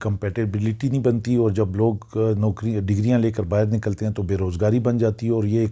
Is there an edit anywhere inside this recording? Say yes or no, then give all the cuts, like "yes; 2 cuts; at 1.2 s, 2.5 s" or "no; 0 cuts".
no; 0 cuts